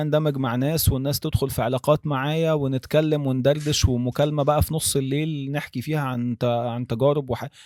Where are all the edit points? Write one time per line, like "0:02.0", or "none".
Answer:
none